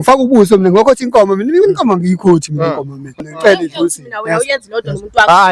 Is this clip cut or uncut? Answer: cut